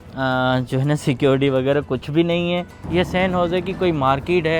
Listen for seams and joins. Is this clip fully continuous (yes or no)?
no